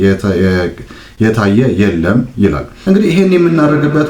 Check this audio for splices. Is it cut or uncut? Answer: cut